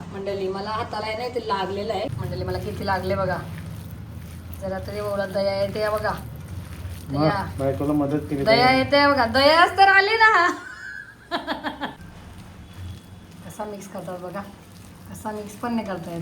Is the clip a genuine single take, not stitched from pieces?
no; 2 cuts; at 2.2 s, 11.9 s

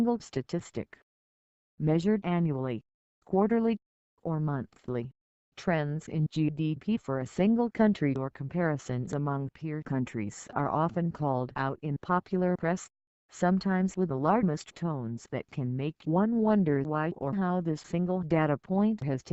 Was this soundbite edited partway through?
no; 0 cuts

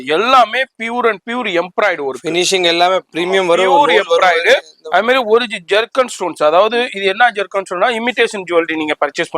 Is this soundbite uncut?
yes; 0 cuts

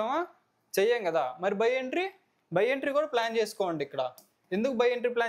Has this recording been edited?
no; 0 cuts

